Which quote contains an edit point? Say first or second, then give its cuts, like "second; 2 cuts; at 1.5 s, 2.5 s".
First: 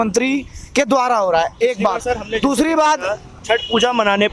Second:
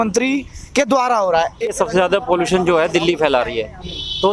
second; 1 cut; at 1.7 s